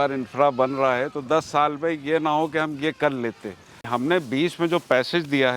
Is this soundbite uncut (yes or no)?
no